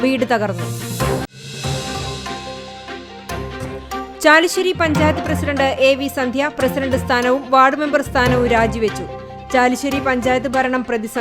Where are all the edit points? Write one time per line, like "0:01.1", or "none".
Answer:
none